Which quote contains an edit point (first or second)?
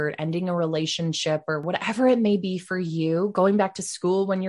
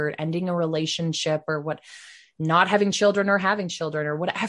first